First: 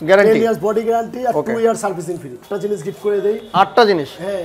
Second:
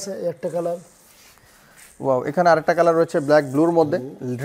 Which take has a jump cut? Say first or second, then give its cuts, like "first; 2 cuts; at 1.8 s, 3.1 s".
first; 1 cut; at 2.4 s